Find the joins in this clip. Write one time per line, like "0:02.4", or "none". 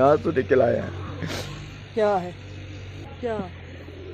0:03.1